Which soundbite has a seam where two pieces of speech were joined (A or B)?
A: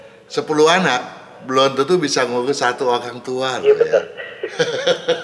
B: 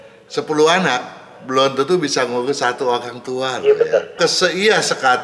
B